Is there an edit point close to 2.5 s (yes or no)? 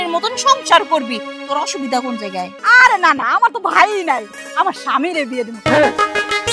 yes